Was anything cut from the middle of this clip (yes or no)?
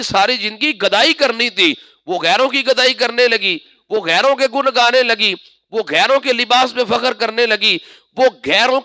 no